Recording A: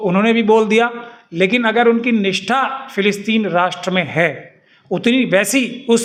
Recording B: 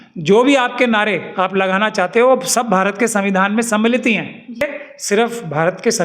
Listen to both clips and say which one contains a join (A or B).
B